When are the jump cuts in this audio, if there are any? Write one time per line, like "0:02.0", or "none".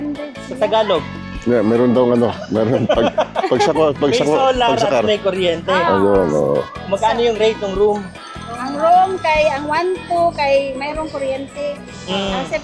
none

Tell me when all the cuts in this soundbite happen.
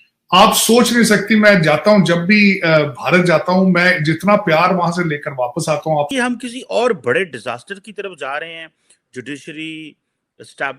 0:06.1

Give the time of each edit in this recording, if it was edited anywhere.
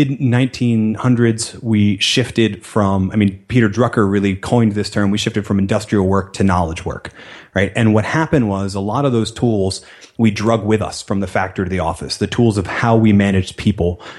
none

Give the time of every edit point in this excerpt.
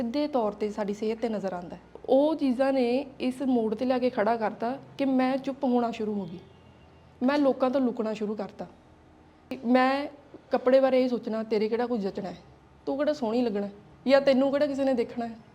0:01.9
0:09.6

